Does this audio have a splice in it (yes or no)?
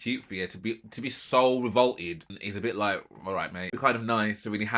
yes